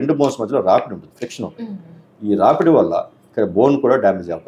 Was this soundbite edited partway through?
no; 0 cuts

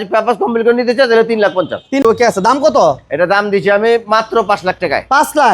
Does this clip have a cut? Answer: yes; 1 cut; at 2.0 s

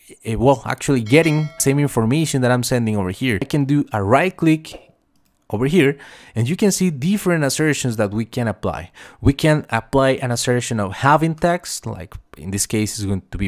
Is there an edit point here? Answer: yes; 2 cuts; at 1.5 s, 3.4 s

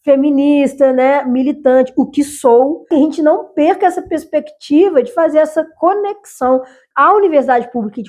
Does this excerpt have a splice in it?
yes; 1 cut; at 2.8 s

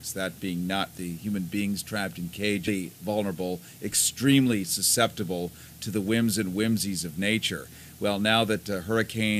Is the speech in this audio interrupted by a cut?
no; 0 cuts

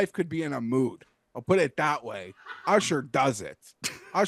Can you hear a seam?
no; 0 cuts

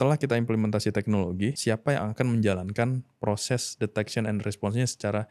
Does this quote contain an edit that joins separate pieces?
yes; 1 cut; at 1.6 s

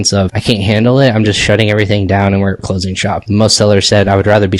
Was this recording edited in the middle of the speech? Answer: no; 0 cuts

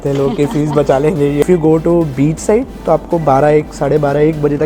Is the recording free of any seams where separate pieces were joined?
no; 1 cut; at 1.4 s

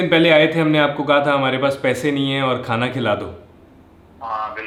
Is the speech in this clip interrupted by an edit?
no; 0 cuts

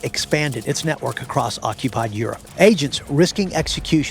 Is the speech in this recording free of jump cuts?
no; 1 cut; at 2.4 s

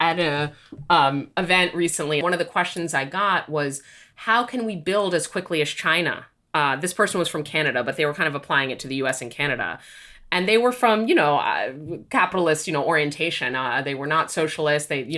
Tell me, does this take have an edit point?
yes; 1 cut; at 2.2 s

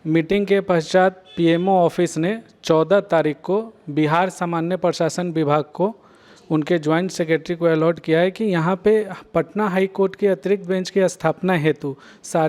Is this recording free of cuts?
yes; 0 cuts

